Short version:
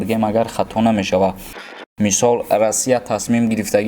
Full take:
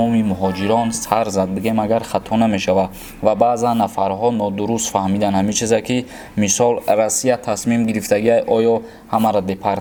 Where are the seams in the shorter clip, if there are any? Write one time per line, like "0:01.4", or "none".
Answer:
0:01.6